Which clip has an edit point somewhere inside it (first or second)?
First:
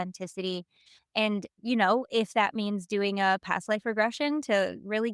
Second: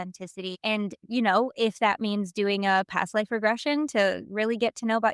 second